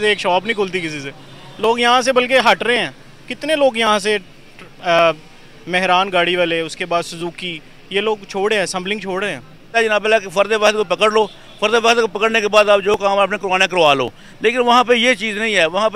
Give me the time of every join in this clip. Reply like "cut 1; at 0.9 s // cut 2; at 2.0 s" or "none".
cut 1; at 9.7 s

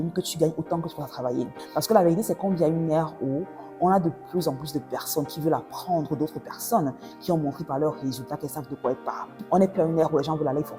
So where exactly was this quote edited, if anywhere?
cut 1; at 1.6 s // cut 2; at 9.3 s

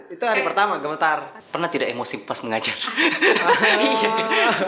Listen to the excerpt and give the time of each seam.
cut 1; at 1.4 s

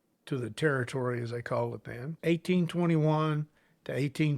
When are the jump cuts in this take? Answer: cut 1; at 2.0 s

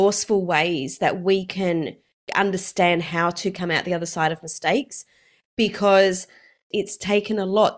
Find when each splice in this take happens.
cut 1; at 6.6 s

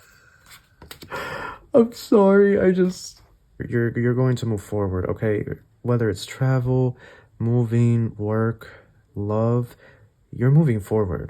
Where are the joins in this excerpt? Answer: cut 1; at 3.7 s

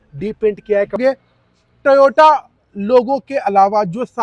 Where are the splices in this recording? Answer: cut 1; at 1.0 s

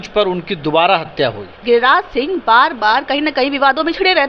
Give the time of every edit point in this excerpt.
cut 1; at 1.5 s

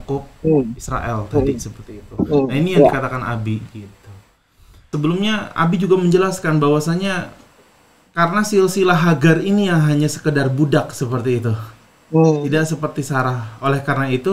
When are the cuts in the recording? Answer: cut 1; at 4.9 s

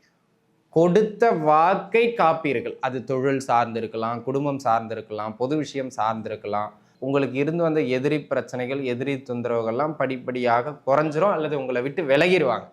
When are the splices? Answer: cut 1; at 6.9 s

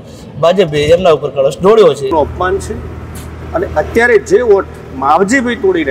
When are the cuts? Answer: cut 1; at 2.1 s

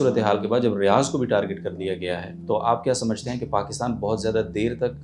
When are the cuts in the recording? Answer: cut 1; at 2.3 s

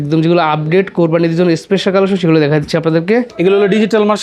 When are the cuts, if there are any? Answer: cut 1; at 3.3 s

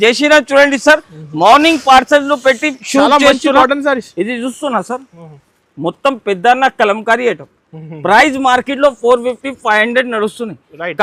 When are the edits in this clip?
none

